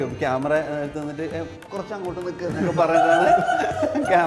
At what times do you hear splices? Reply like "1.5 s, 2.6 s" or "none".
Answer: none